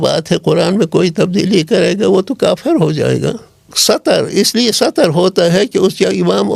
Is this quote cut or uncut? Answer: cut